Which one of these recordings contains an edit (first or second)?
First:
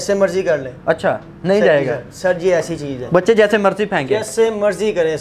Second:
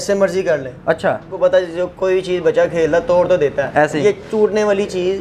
second